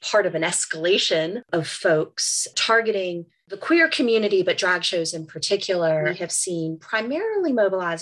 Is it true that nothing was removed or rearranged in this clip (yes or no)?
no